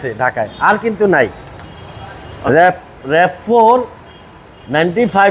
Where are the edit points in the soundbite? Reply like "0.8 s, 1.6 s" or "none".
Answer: none